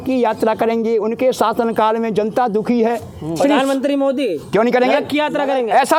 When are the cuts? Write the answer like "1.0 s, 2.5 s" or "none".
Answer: none

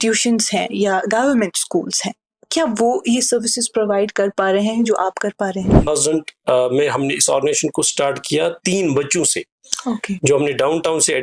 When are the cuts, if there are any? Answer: 5.9 s

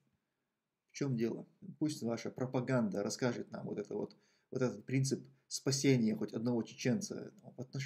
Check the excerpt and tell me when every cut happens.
1.6 s

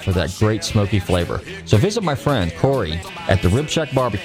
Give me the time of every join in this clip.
2.7 s

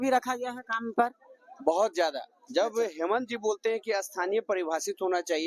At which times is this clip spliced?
none

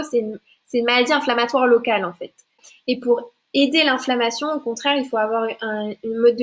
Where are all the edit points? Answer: 2.7 s

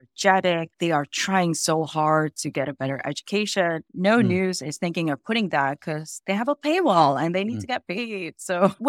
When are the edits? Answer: 3.9 s

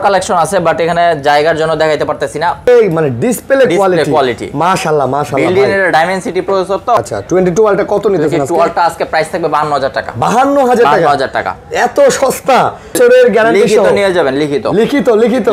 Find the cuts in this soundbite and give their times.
2.6 s, 7.0 s, 12.9 s

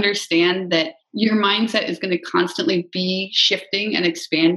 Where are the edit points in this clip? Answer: 1.0 s, 1.7 s

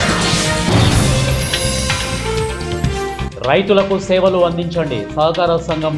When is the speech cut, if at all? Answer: 3.3 s

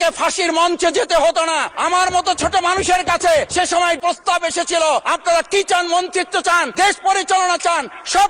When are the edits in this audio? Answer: 1.7 s, 3.7 s, 5.0 s, 6.7 s

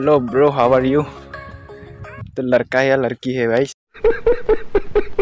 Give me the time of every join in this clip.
none

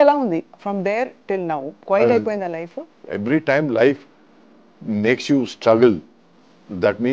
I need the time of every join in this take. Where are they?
1.7 s, 2.8 s

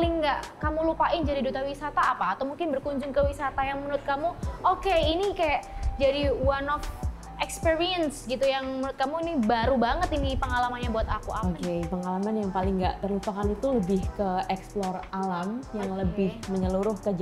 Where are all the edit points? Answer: none

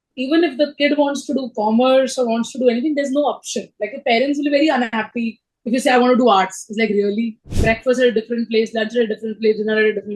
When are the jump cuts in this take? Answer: 7.4 s

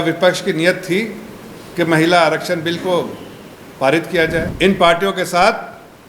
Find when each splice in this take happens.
4.5 s

